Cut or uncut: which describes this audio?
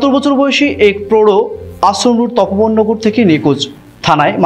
uncut